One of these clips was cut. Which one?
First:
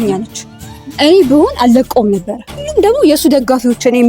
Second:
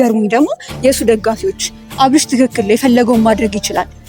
first; 1 cut; at 2.7 s

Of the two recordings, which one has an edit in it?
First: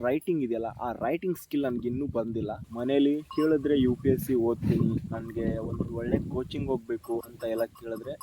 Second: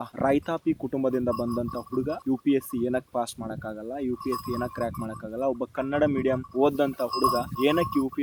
first; 1 cut; at 2.6 s

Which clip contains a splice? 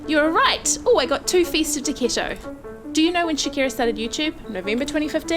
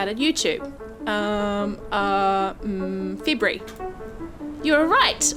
first; 1 cut; at 2.9 s

